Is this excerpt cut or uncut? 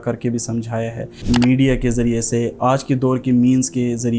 cut